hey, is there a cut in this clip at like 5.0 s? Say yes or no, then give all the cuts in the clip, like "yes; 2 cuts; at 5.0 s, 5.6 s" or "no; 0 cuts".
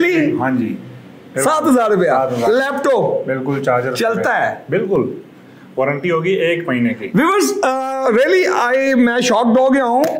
no; 0 cuts